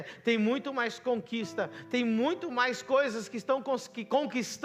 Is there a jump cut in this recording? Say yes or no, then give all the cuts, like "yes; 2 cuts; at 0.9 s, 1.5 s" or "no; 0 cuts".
no; 0 cuts